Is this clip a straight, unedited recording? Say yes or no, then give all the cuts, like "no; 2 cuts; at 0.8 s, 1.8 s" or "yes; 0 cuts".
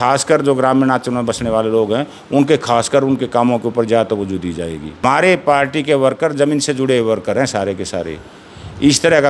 no; 1 cut; at 5.0 s